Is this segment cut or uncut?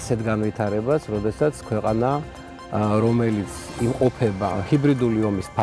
cut